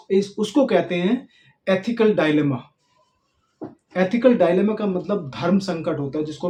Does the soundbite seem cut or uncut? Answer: uncut